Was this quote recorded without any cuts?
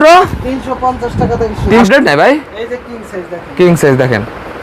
no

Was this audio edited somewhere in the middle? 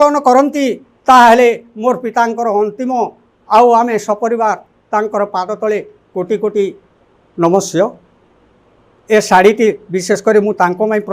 no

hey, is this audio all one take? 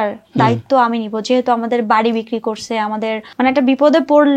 no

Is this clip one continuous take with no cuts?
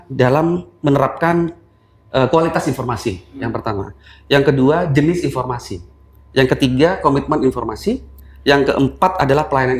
yes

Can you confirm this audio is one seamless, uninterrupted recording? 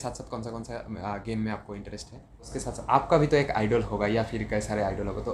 no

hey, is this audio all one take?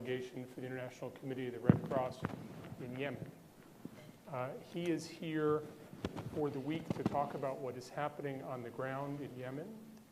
yes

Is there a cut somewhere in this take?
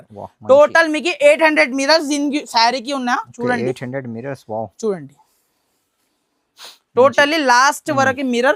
no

